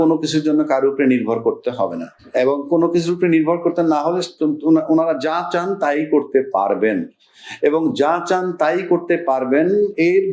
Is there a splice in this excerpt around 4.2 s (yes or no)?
no